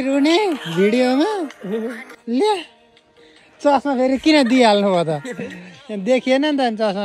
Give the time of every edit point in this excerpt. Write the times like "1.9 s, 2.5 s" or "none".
2.1 s